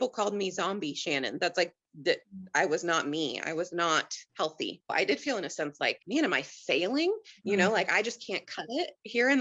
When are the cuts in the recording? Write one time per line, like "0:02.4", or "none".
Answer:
0:04.9